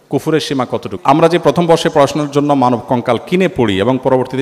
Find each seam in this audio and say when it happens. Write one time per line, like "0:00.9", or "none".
0:00.9